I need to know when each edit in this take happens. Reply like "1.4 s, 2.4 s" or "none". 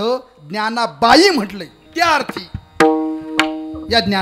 1.8 s